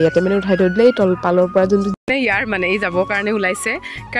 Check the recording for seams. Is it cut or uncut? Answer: cut